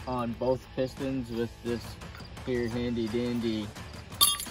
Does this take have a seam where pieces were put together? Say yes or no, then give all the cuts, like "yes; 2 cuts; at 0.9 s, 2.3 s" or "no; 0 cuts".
no; 0 cuts